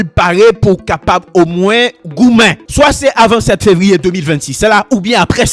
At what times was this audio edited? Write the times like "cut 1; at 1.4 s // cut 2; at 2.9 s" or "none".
cut 1; at 2.6 s

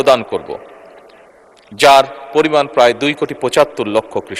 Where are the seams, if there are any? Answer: none

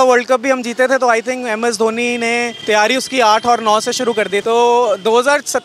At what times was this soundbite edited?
cut 1; at 2.5 s // cut 2; at 4.4 s

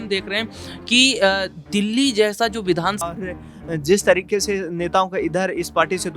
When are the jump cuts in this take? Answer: cut 1; at 3.1 s

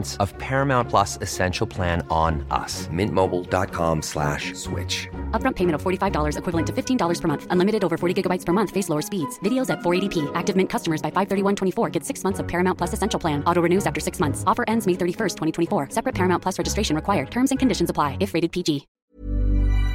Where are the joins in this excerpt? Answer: cut 1; at 18.9 s

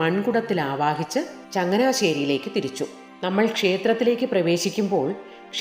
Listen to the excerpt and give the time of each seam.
cut 1; at 1.4 s // cut 2; at 3.0 s

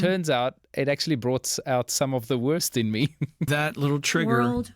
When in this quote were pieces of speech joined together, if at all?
cut 1; at 3.4 s

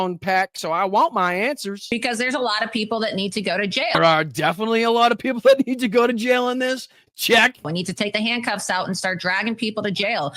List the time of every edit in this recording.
cut 1; at 1.8 s // cut 2; at 3.9 s // cut 3; at 7.7 s

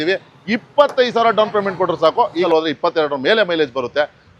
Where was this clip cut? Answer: cut 1; at 2.5 s

